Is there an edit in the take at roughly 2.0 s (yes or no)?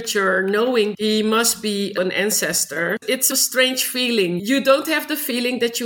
yes